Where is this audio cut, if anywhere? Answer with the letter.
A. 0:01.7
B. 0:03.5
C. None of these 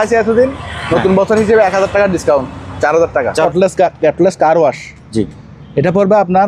B